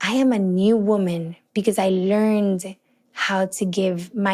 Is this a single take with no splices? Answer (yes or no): yes